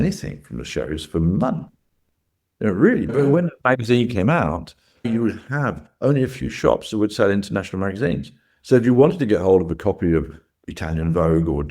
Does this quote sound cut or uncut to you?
cut